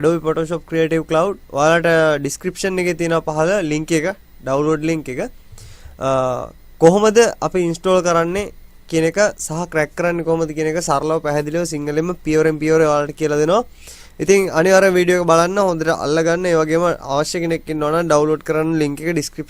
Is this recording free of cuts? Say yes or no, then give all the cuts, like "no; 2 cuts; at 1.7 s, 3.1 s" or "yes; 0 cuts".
yes; 0 cuts